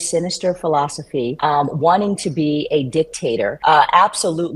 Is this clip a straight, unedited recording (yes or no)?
no